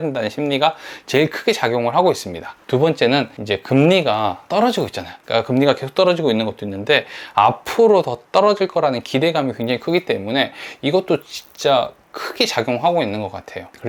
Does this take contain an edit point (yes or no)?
no